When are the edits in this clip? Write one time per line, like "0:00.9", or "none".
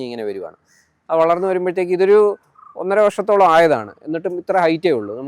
none